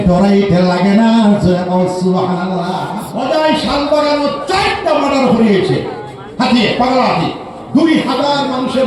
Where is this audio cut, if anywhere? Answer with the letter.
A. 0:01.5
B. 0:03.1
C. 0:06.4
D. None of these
B